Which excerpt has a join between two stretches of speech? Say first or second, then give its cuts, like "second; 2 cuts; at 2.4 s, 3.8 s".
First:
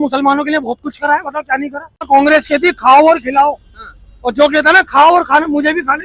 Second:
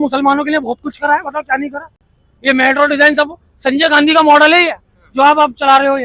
first; 1 cut; at 2.1 s